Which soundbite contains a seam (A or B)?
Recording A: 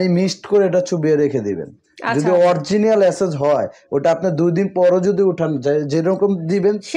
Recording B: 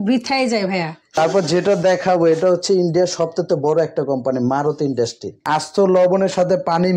B